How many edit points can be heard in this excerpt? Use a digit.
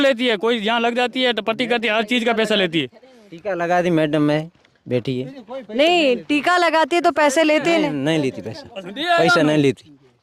0